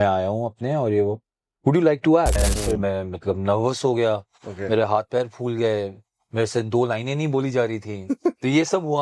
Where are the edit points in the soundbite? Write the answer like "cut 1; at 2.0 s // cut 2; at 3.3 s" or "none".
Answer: cut 1; at 2.6 s